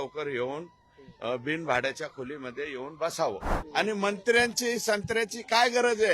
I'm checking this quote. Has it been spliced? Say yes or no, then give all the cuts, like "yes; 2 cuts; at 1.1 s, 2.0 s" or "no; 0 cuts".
yes; 1 cut; at 3.5 s